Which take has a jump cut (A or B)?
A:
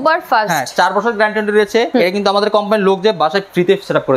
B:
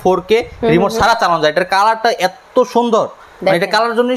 A